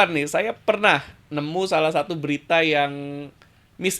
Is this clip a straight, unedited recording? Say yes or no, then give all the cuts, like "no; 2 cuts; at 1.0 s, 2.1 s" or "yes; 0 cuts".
no; 1 cut; at 1.3 s